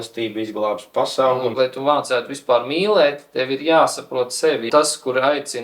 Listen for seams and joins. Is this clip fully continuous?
no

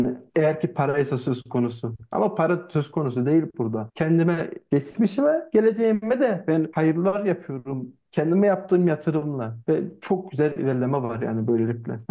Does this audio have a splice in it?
no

